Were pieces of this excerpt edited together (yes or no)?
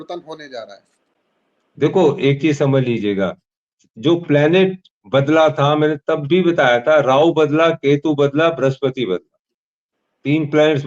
no